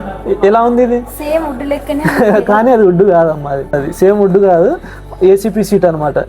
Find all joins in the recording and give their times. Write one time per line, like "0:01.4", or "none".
0:03.8